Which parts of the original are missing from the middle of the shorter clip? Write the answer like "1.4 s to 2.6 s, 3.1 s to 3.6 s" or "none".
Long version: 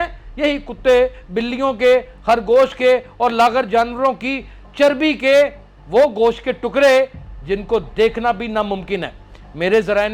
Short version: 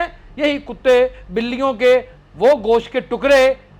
2.1 s to 5.6 s